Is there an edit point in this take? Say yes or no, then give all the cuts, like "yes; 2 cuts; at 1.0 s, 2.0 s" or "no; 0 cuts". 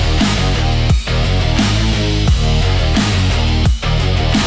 no; 0 cuts